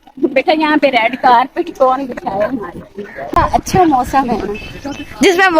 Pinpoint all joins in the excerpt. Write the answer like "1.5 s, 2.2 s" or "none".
3.2 s